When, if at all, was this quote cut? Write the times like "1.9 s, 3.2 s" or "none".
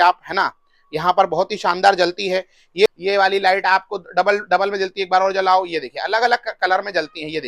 2.9 s